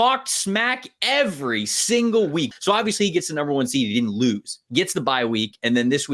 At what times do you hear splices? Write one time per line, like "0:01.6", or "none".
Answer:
0:02.5
0:04.5